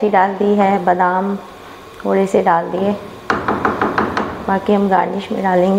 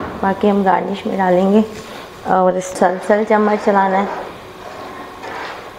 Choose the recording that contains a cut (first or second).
second